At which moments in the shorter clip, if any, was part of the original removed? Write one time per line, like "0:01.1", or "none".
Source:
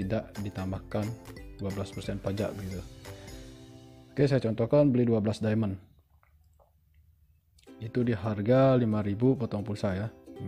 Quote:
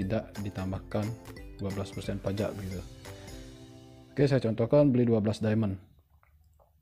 none